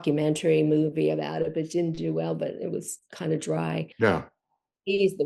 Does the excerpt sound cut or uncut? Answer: cut